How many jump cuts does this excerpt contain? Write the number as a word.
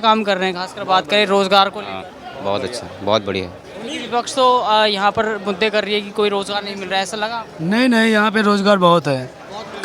zero